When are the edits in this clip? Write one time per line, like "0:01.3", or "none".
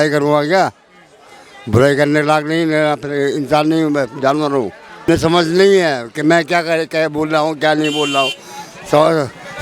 0:05.1